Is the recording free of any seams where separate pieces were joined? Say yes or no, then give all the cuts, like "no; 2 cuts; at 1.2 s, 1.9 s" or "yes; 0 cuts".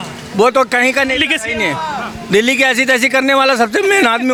yes; 0 cuts